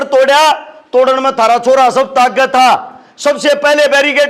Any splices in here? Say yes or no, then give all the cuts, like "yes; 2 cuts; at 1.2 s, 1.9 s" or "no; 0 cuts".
no; 0 cuts